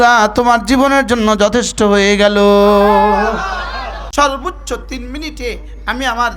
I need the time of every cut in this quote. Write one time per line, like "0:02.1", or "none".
0:04.0